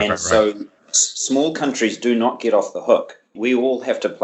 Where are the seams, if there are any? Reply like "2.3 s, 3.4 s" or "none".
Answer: 3.3 s